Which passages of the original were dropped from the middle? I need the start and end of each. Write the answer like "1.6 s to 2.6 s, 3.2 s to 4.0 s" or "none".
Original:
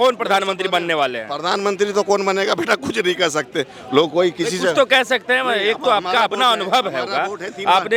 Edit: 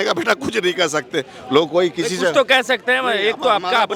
none